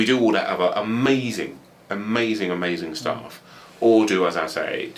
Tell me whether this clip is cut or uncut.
uncut